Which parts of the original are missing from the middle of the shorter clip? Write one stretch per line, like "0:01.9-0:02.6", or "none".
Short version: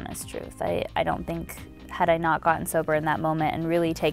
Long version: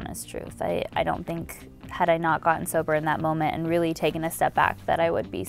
none